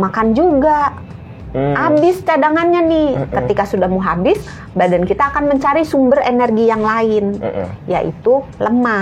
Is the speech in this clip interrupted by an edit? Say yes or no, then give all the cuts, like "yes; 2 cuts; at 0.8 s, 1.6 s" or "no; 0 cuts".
no; 0 cuts